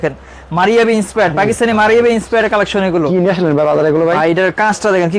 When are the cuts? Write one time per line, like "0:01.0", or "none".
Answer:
none